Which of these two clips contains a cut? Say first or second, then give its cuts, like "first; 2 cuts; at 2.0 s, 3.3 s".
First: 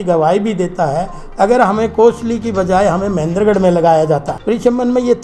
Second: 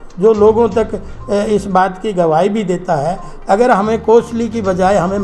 first; 1 cut; at 4.3 s